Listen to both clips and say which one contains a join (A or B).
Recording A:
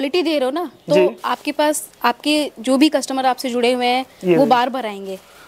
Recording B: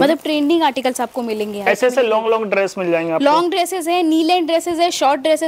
B